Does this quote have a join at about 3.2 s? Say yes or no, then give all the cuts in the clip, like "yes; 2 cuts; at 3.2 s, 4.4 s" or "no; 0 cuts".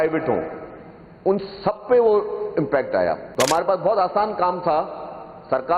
yes; 1 cut; at 3.2 s